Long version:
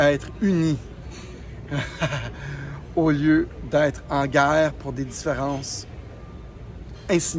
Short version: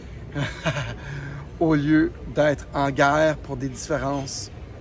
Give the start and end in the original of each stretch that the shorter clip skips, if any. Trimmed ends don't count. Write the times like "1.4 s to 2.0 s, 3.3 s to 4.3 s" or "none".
none